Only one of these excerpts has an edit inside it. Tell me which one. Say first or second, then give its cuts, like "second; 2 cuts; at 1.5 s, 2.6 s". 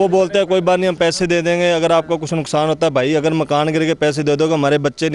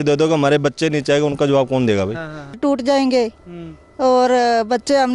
second; 1 cut; at 2.6 s